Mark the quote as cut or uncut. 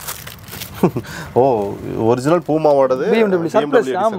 uncut